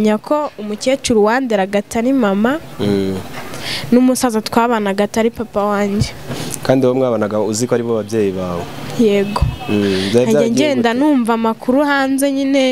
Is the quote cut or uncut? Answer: uncut